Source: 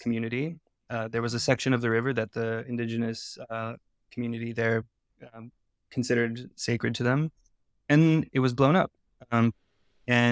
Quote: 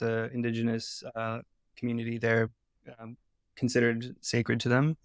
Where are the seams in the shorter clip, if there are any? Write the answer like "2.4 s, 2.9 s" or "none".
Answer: none